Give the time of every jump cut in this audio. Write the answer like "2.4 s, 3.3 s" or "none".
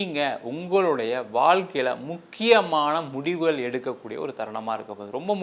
none